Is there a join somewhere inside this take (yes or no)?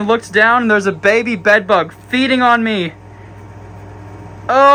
no